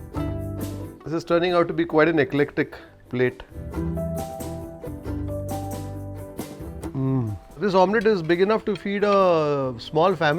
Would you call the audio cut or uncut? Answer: cut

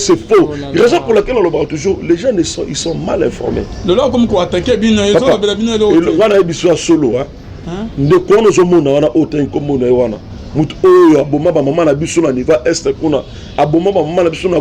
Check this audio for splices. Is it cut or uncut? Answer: uncut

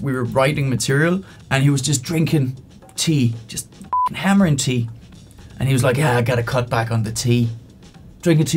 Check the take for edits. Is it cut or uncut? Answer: cut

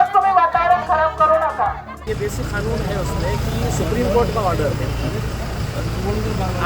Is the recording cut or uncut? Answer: cut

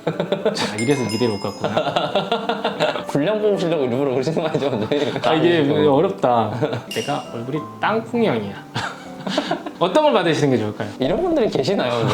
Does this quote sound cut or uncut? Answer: cut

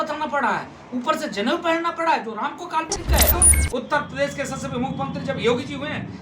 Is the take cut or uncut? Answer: cut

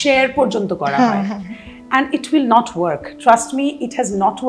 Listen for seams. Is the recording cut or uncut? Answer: uncut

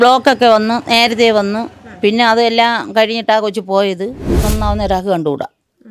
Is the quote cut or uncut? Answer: cut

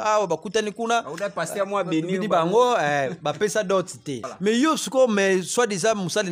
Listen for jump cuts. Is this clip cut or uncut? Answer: cut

